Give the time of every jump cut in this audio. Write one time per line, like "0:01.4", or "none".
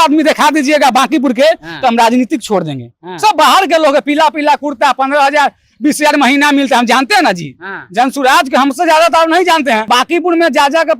0:09.9